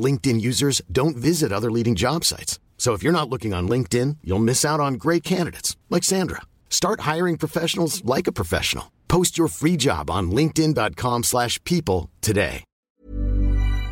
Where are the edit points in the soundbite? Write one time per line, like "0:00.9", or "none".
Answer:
0:13.0